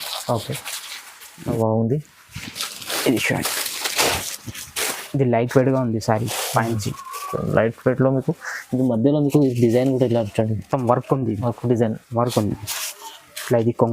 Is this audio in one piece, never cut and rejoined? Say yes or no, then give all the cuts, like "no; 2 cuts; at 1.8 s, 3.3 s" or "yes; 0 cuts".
no; 1 cut; at 1.6 s